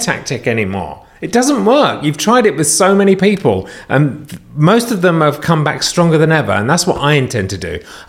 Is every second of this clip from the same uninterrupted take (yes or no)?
yes